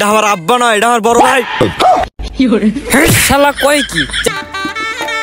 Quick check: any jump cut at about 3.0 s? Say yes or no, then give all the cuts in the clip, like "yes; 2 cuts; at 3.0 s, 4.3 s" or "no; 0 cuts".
no; 1 cut; at 4.3 s